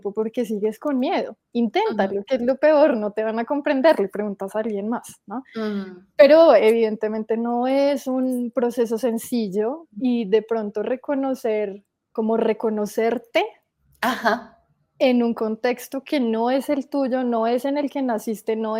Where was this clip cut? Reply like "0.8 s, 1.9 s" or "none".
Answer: 10.0 s, 12.1 s